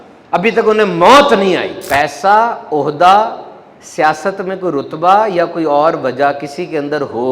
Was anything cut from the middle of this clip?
yes; 1 cut; at 1.8 s

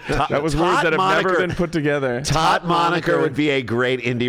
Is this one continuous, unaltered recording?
yes; 0 cuts

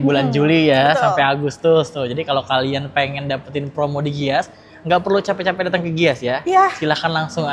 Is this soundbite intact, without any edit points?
yes; 0 cuts

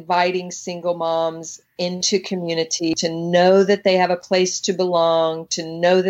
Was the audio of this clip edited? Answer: yes; 1 cut; at 3.0 s

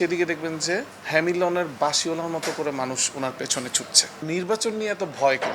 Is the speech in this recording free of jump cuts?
no; 1 cut; at 4.0 s

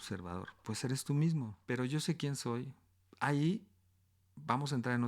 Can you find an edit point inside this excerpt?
yes; 1 cut; at 1.6 s

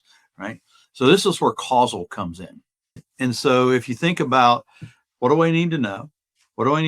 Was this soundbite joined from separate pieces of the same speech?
yes; 1 cut; at 3.1 s

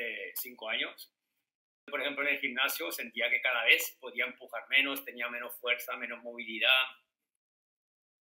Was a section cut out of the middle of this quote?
yes; 1 cut; at 1.9 s

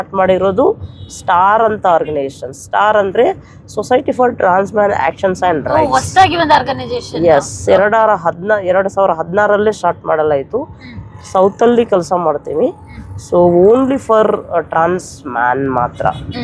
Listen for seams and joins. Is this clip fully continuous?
yes; 0 cuts

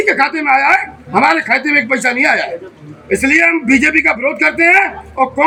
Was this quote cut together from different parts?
no; 0 cuts

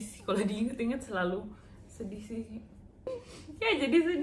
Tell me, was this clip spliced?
yes; 1 cut; at 3.2 s

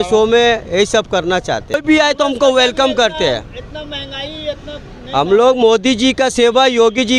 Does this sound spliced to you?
yes; 1 cut; at 1.8 s

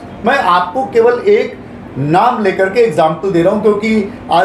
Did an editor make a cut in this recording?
no; 0 cuts

